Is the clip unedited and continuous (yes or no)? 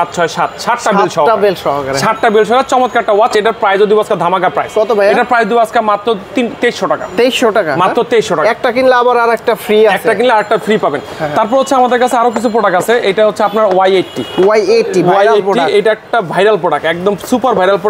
yes